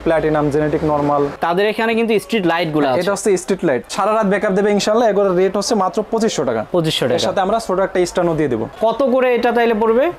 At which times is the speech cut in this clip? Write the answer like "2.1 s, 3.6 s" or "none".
1.3 s, 3.8 s, 8.7 s